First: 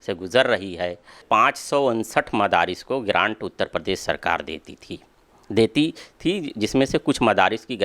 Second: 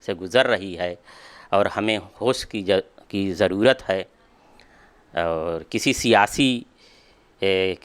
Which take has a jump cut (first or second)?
first